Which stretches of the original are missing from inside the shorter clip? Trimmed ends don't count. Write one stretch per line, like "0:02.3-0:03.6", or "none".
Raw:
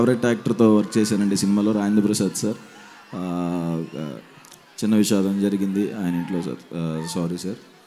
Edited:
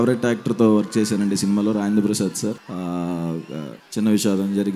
0:02.7-0:03.1
0:04.2-0:04.6